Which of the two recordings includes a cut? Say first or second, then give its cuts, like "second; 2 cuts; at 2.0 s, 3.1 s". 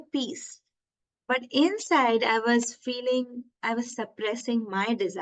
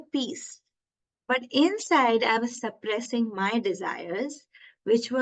second; 1 cut; at 2.4 s